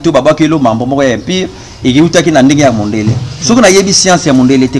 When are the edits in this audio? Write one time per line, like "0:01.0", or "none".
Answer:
none

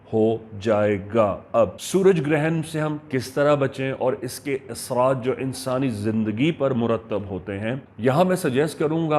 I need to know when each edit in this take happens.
0:01.8
0:07.9

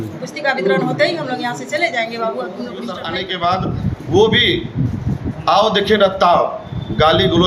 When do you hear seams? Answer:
0:03.2

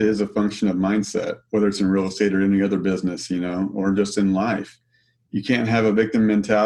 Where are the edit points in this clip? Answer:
none

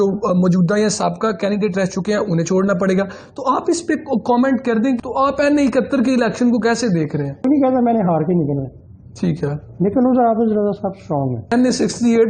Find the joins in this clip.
0:05.0
0:07.4
0:11.5

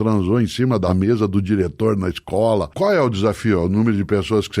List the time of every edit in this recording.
0:00.9
0:02.7

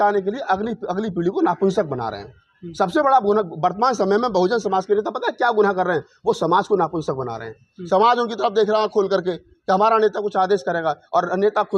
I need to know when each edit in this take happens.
none

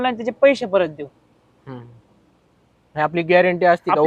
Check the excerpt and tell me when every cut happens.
none

